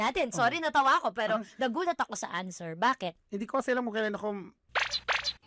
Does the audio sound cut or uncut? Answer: uncut